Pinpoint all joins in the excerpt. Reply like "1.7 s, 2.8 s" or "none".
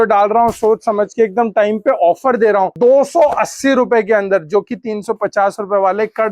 2.7 s